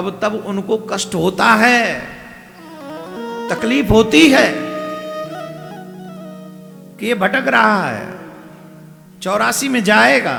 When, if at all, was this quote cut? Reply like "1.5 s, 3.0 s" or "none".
none